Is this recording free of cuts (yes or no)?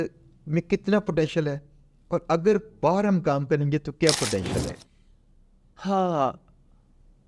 yes